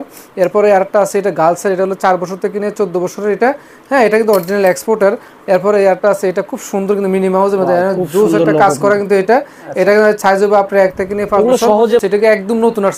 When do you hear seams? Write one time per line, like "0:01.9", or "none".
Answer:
0:12.0

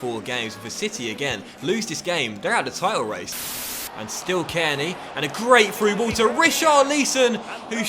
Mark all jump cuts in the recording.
0:03.5

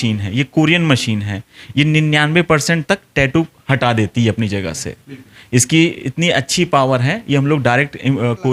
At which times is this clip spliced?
none

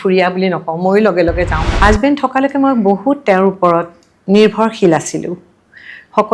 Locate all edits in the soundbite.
0:01.6

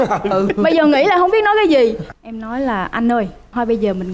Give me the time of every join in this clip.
0:02.1

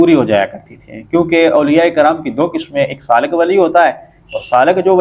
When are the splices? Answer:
none

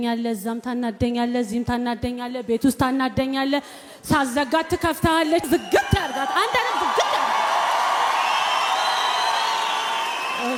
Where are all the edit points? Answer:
none

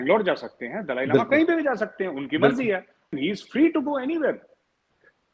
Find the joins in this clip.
0:03.2

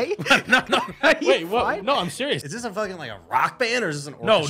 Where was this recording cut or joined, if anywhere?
0:02.5

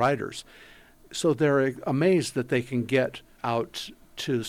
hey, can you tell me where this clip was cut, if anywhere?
0:03.3

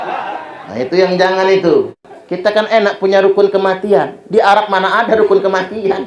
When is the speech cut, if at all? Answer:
0:02.0

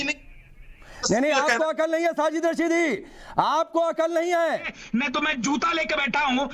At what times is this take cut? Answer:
0:01.0
0:04.7

